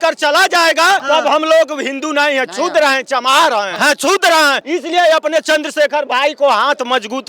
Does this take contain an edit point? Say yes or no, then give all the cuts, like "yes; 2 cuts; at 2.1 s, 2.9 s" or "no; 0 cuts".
yes; 3 cuts; at 1.0 s, 3.7 s, 4.6 s